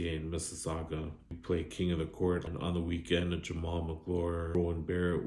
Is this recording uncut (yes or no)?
no